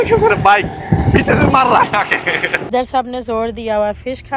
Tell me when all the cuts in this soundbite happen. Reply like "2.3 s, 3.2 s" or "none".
2.7 s